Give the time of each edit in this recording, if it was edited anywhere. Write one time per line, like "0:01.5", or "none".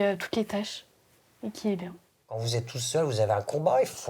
0:02.4